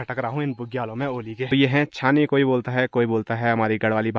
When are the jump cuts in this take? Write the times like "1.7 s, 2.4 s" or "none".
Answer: 1.5 s